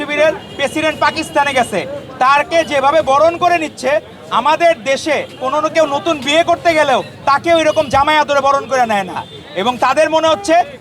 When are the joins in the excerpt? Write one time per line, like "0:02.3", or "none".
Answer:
none